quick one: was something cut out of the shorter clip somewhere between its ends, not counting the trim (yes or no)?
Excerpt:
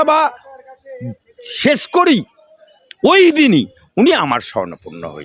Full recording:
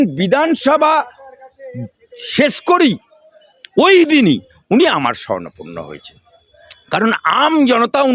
no